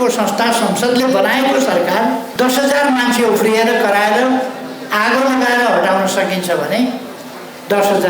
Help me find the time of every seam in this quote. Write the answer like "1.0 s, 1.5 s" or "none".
2.3 s